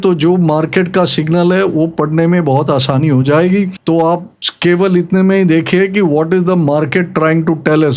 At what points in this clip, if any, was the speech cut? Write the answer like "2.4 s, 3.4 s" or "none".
none